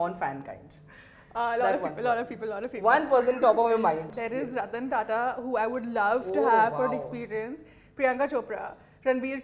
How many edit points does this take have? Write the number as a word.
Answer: one